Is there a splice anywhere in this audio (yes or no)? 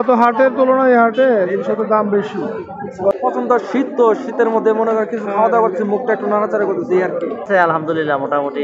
yes